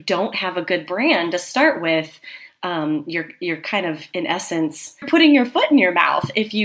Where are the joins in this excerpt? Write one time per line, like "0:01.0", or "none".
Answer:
0:05.1